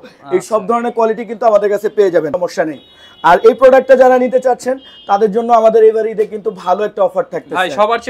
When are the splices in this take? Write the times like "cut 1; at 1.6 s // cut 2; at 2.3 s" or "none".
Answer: cut 1; at 2.3 s